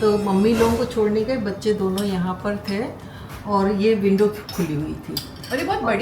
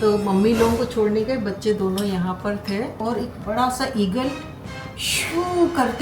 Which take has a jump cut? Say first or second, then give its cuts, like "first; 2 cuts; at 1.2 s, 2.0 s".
second; 1 cut; at 3.0 s